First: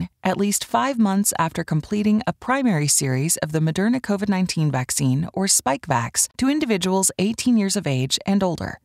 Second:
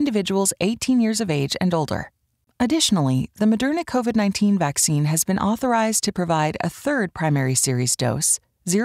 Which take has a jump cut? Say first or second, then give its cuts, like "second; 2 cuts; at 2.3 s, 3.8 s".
first; 1 cut; at 6.2 s